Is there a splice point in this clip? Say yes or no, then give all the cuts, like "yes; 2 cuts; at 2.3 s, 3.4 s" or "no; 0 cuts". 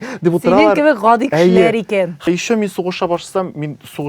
yes; 1 cut; at 2.2 s